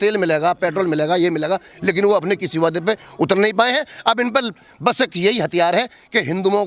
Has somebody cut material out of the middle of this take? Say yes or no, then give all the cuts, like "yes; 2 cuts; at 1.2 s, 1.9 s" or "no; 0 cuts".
no; 0 cuts